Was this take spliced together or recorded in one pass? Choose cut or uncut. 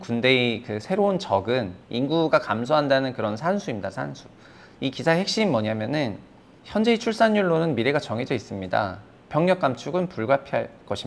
cut